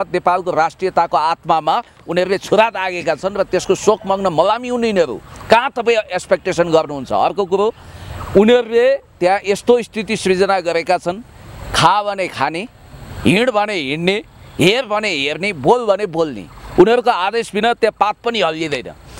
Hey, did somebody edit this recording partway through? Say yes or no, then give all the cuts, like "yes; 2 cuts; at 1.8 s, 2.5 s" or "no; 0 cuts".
no; 0 cuts